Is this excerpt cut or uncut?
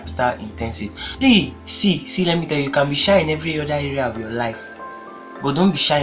cut